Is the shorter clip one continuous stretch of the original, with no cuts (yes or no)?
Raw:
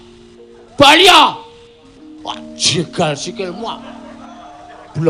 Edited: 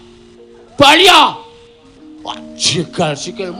yes